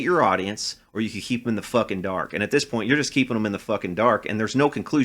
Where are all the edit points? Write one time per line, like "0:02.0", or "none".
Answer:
none